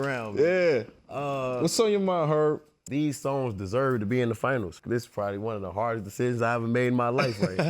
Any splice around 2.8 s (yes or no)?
no